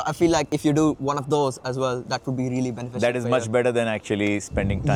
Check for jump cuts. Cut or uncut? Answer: uncut